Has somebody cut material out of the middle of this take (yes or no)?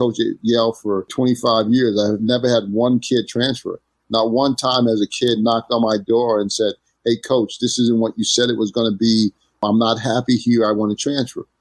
yes